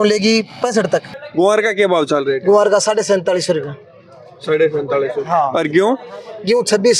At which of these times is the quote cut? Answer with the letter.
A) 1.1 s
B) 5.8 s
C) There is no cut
A